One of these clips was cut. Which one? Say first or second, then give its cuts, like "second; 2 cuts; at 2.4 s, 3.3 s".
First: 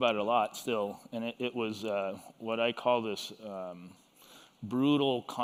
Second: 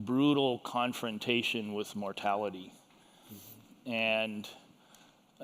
second; 1 cut; at 2.1 s